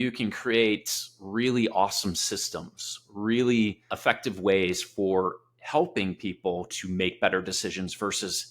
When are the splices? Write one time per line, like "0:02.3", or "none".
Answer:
0:04.0